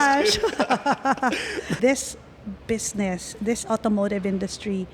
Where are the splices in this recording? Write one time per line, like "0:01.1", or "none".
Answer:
0:01.8

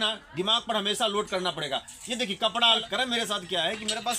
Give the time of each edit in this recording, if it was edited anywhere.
0:02.8

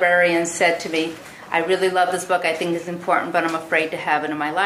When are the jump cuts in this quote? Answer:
0:01.2

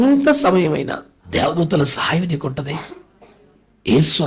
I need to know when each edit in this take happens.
0:01.1

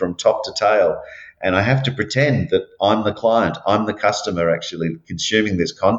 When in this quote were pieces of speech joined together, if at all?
none

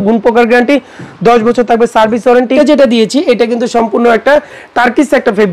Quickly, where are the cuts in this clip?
0:02.5

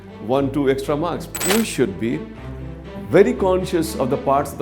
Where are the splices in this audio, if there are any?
0:01.4

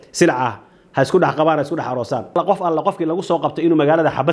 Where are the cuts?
0:02.4

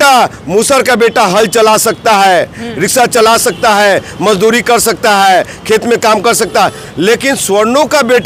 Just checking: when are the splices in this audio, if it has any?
none

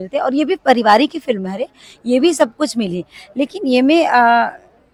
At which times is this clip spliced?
none

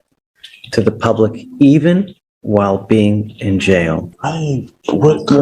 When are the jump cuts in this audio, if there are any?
0:04.1

